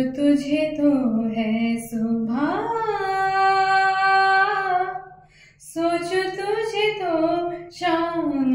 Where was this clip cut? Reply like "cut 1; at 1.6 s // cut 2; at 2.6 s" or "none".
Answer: none